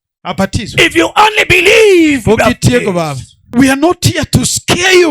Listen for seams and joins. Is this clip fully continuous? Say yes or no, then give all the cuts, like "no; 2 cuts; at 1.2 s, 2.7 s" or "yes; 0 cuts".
no; 1 cut; at 3.5 s